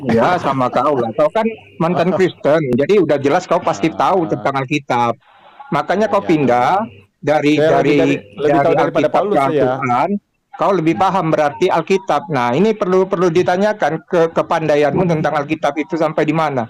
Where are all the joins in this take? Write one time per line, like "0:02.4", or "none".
none